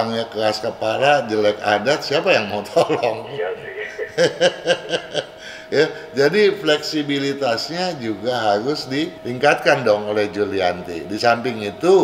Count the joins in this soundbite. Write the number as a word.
one